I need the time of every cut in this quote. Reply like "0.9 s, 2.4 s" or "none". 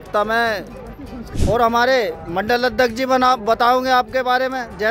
1.3 s